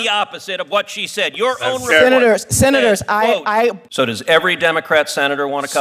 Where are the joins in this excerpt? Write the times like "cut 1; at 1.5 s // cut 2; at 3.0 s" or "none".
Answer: cut 1; at 3.8 s